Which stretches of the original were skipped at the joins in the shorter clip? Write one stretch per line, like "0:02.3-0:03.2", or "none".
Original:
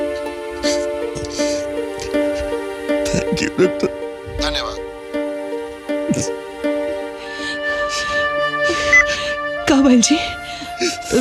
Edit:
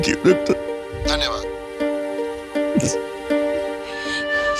none